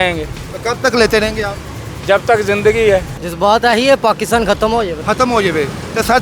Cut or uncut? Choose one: cut